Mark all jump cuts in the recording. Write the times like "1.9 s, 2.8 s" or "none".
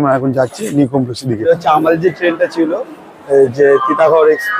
1.4 s